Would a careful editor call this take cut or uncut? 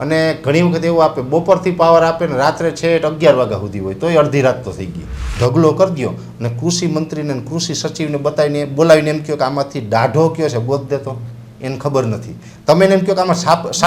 cut